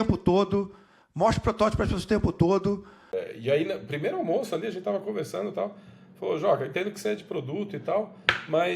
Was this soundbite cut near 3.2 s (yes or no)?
yes